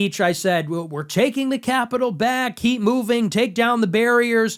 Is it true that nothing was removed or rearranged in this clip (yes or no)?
yes